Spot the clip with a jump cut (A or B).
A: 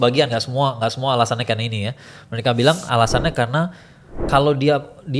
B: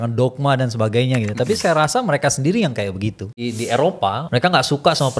B